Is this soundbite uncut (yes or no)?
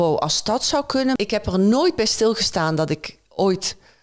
no